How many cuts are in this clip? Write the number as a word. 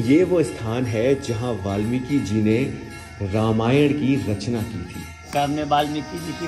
one